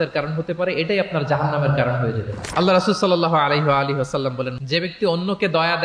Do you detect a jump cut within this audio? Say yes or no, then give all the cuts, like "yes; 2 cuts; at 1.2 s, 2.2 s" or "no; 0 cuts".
yes; 1 cut; at 4.5 s